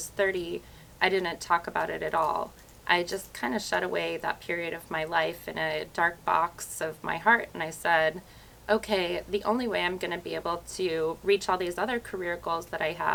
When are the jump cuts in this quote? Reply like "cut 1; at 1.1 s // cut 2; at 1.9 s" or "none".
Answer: none